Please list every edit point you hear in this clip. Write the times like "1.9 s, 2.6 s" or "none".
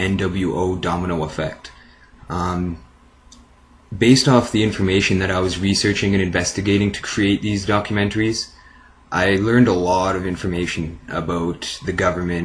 8.0 s